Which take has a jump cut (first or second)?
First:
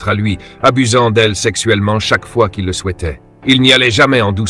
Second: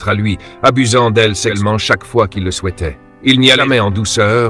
second